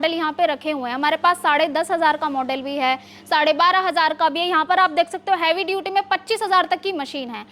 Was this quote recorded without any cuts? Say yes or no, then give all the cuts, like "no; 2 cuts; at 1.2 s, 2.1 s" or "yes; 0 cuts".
yes; 0 cuts